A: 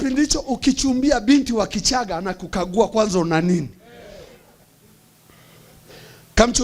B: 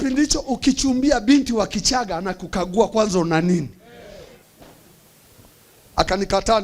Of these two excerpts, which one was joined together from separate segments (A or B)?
B